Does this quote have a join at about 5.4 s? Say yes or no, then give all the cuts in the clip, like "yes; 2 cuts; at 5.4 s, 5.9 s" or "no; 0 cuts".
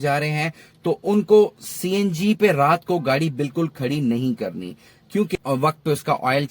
yes; 1 cut; at 5.4 s